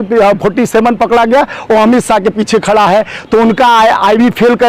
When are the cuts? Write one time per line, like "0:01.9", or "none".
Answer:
none